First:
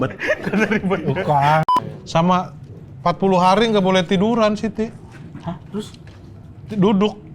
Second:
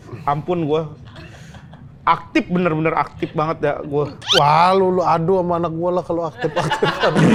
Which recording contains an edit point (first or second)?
first